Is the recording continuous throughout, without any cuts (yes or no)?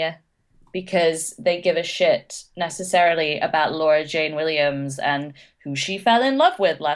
yes